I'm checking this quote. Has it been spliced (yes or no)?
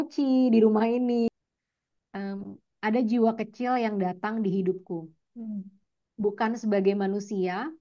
yes